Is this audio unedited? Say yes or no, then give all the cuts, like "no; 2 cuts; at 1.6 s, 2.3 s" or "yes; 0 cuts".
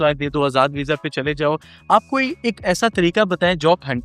yes; 0 cuts